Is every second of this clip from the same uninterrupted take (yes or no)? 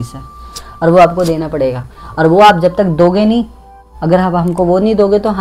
yes